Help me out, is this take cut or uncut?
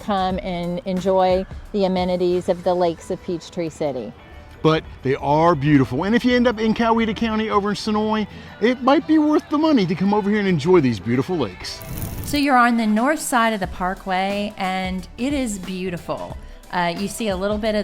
uncut